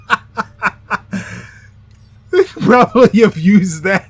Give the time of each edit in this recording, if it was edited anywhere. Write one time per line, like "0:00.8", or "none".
none